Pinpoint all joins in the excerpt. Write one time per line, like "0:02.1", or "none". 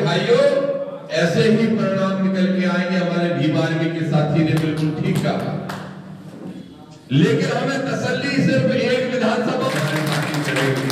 0:09.7